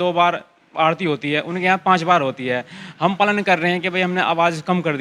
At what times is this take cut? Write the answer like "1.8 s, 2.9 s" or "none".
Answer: none